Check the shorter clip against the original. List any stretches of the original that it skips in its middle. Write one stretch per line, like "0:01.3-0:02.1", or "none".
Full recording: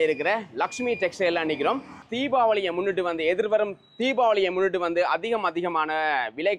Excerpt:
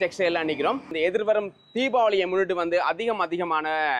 0:01.9-0:03.1